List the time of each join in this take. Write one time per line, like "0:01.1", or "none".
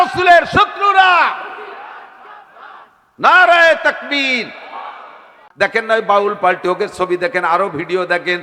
0:05.5